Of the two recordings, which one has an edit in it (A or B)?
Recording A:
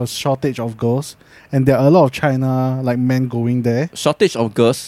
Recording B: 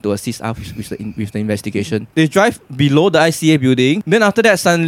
B